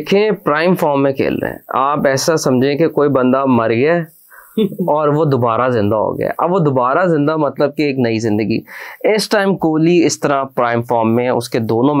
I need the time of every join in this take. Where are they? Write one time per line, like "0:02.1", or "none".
none